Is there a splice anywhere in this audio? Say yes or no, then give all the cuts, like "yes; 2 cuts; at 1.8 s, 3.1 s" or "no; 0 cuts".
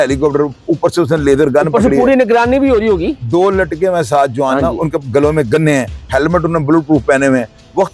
no; 0 cuts